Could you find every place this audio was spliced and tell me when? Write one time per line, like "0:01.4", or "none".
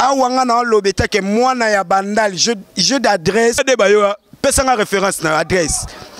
0:03.6